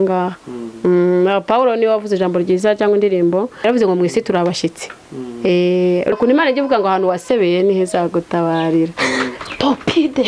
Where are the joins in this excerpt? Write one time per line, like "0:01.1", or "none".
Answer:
0:03.5
0:06.1